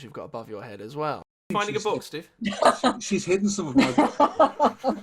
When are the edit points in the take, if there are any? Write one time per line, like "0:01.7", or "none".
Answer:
0:01.2